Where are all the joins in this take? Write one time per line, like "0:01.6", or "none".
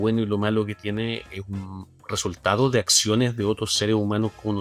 none